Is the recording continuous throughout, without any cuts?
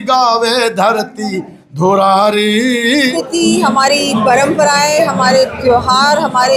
no; 1 cut; at 3.1 s

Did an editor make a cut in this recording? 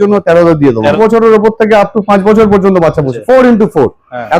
yes; 2 cuts; at 0.9 s, 3.1 s

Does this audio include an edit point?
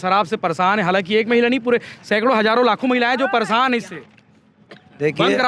no; 0 cuts

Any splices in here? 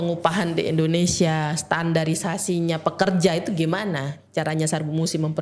no; 0 cuts

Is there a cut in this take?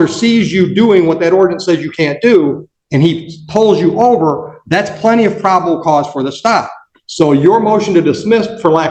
no; 0 cuts

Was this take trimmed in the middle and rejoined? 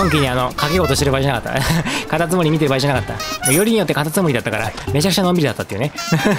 no; 0 cuts

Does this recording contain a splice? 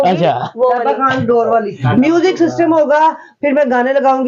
yes; 1 cut; at 1.8 s

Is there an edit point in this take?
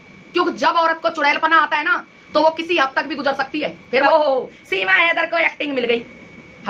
yes; 1 cut; at 4.0 s

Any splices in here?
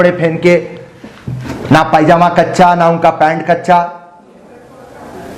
no; 0 cuts

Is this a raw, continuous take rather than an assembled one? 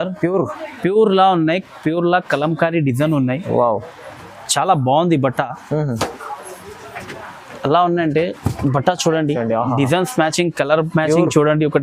yes; 0 cuts

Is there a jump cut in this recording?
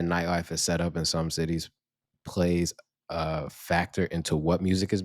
no; 0 cuts

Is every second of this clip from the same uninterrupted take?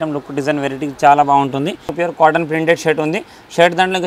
no; 1 cut; at 2.0 s

